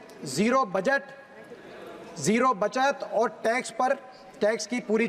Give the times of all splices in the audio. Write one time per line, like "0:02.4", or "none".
none